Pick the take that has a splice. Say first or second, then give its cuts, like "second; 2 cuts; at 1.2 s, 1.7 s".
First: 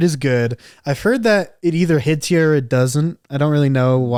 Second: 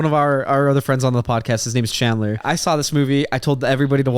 second; 1 cut; at 2.4 s